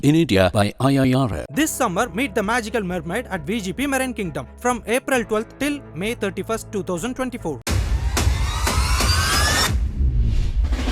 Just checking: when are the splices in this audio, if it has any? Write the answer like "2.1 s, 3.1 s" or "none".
none